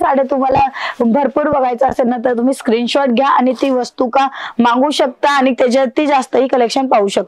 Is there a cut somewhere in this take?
no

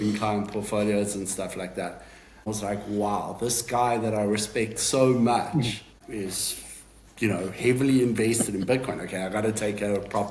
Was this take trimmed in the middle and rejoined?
yes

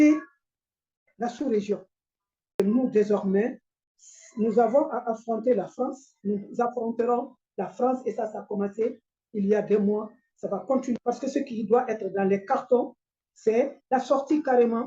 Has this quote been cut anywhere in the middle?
yes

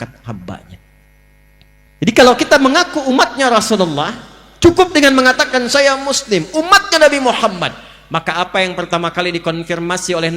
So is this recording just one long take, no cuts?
no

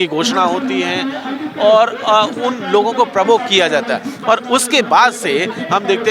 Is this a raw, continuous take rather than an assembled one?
yes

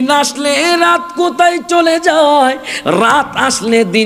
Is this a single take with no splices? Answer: yes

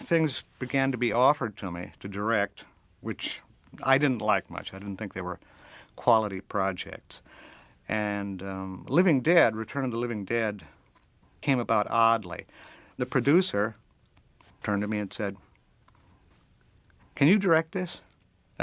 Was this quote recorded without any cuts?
yes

